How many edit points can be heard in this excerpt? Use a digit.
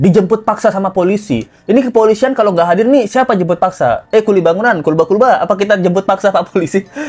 0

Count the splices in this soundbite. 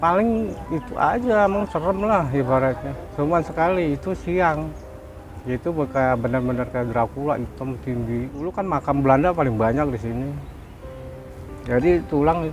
1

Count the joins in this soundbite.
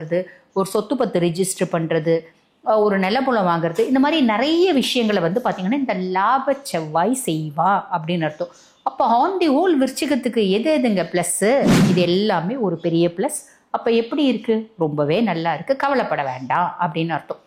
1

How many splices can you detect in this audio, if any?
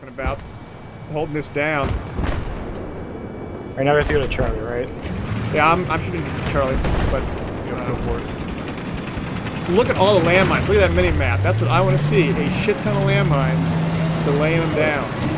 1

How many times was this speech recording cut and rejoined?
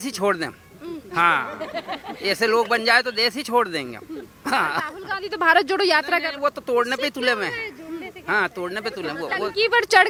0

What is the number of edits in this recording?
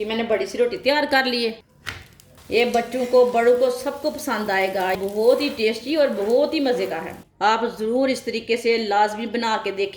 2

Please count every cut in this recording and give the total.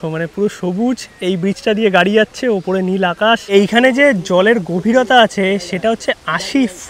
1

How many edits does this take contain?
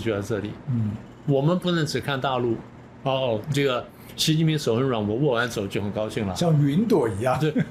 0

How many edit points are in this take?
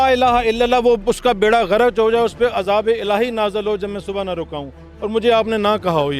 0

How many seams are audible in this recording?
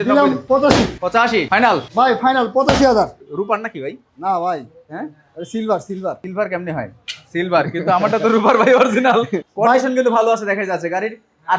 3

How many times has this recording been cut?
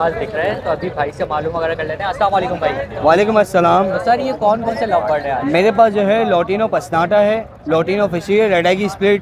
0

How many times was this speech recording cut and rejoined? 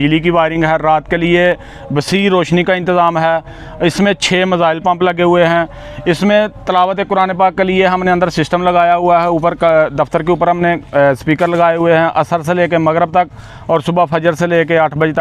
0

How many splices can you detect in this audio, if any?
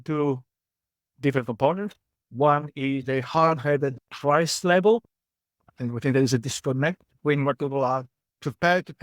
0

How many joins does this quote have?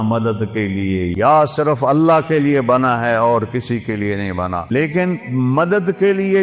2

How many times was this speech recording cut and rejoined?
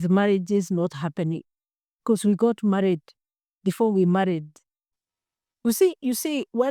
1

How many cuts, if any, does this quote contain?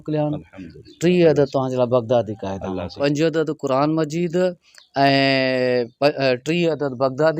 1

